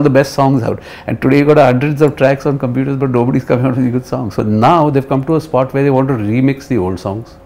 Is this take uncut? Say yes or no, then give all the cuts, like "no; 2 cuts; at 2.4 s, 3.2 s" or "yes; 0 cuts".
no; 1 cut; at 4.4 s